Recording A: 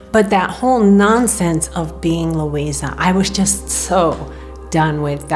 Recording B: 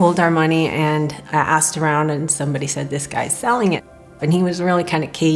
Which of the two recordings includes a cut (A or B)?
B